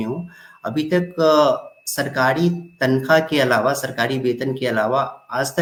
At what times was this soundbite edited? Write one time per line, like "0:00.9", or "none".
none

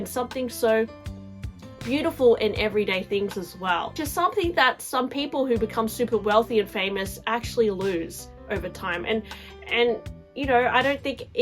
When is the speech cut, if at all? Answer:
0:04.0

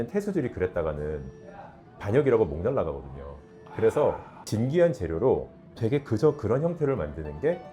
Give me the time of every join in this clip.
0:04.4

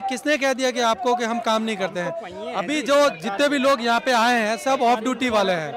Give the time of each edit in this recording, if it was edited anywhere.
none

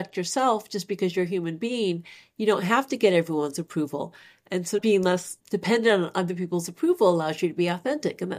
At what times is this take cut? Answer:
none

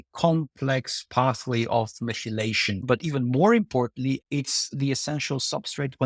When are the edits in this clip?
0:02.8
0:04.2

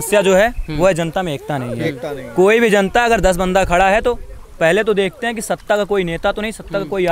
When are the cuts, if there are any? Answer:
none

